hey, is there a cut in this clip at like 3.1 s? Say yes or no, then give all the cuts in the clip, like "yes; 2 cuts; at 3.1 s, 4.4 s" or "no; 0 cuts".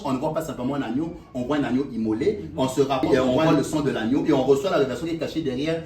yes; 1 cut; at 3.1 s